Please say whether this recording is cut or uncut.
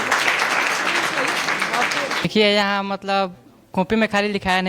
cut